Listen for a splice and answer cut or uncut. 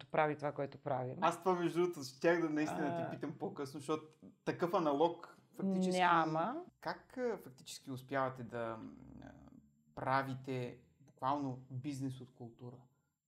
cut